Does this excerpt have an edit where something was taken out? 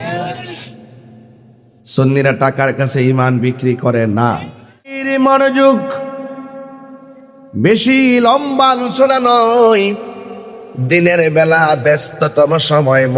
yes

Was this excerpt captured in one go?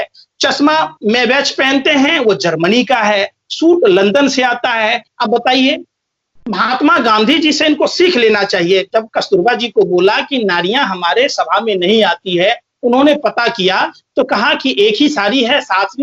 yes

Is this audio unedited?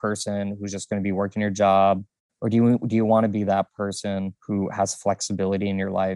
no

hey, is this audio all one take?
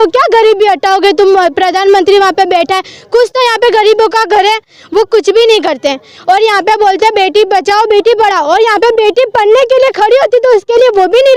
yes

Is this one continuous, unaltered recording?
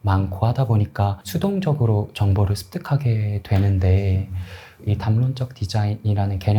no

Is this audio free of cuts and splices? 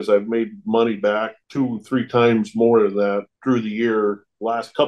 yes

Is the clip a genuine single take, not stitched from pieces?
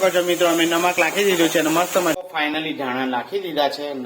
no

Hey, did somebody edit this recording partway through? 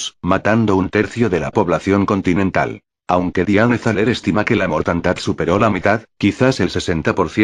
yes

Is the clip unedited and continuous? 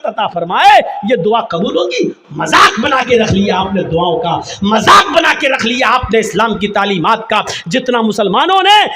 yes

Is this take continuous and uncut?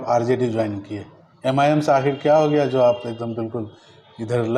yes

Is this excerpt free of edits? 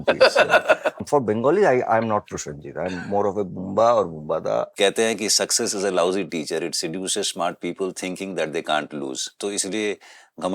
no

